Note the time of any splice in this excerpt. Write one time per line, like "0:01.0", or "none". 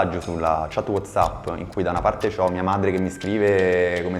none